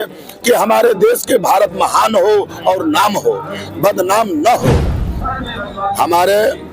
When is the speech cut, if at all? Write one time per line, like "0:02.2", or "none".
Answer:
0:05.1